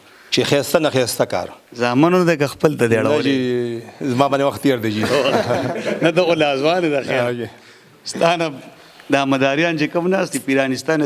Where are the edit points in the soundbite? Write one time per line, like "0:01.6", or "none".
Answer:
none